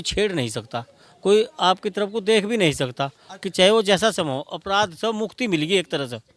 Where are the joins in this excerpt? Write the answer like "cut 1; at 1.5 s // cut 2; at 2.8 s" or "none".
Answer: none